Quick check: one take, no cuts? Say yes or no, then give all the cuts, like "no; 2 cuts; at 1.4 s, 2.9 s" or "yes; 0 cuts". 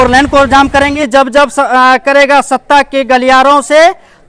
no; 1 cut; at 1.0 s